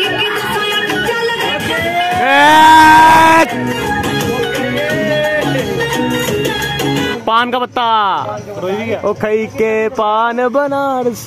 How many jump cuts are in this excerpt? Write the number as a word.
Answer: four